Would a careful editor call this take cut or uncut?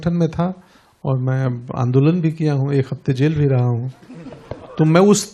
uncut